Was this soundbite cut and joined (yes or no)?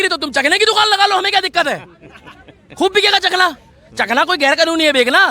no